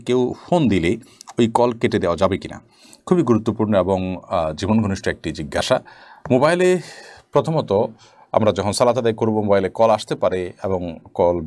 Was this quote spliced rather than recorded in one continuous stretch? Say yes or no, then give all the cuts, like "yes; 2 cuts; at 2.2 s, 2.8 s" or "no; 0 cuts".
no; 0 cuts